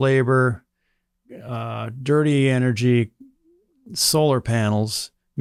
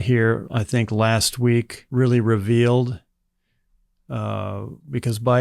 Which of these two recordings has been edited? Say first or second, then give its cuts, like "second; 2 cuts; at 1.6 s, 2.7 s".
second; 1 cut; at 1.8 s